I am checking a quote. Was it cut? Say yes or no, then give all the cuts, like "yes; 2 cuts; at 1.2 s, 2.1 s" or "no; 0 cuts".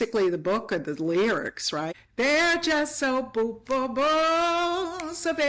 yes; 1 cut; at 1.9 s